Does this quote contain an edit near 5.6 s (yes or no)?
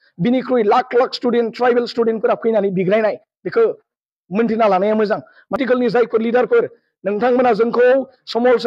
yes